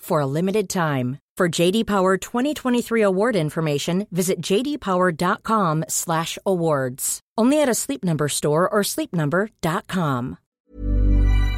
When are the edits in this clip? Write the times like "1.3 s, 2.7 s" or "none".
10.5 s